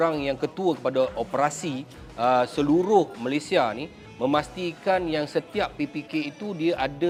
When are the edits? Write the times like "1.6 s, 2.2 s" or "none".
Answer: none